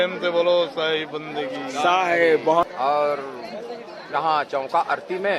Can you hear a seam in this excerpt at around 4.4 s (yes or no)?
no